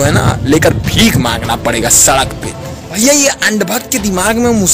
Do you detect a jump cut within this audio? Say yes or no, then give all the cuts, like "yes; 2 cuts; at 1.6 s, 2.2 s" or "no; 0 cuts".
yes; 1 cut; at 3.0 s